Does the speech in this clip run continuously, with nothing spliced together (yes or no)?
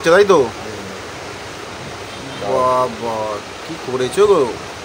yes